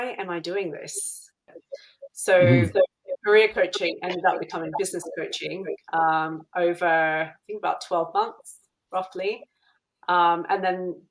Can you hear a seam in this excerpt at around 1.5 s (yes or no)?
yes